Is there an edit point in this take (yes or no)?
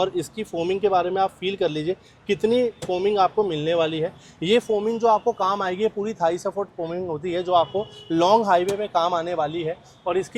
no